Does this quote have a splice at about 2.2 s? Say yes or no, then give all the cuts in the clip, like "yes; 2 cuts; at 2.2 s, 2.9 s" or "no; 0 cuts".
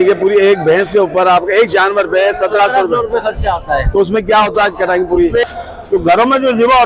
no; 1 cut; at 5.4 s